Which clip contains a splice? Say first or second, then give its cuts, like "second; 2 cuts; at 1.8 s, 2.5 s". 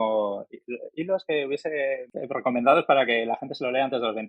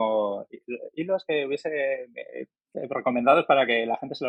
first; 1 cut; at 2.1 s